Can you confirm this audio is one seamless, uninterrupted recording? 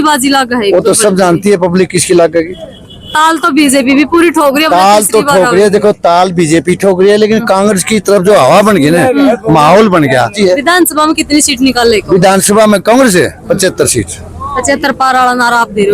no; 1 cut; at 10.3 s

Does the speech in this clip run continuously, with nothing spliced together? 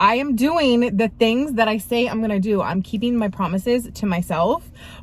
yes; 0 cuts

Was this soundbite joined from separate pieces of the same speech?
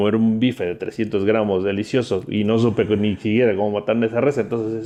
no; 0 cuts

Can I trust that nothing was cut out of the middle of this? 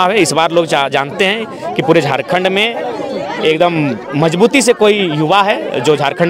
yes; 0 cuts

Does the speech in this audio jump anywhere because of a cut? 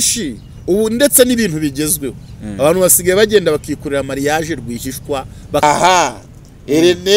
yes; 1 cut; at 5.6 s

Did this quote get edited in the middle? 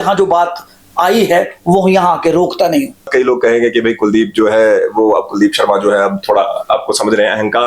yes; 1 cut; at 3.1 s

